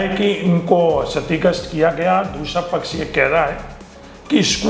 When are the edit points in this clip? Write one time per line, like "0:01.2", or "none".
none